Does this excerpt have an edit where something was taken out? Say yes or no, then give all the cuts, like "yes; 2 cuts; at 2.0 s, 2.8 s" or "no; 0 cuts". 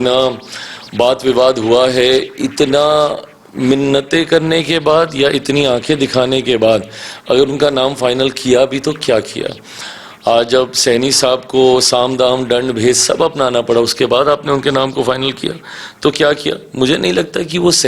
no; 0 cuts